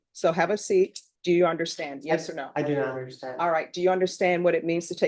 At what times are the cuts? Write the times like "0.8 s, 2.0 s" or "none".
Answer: 1.1 s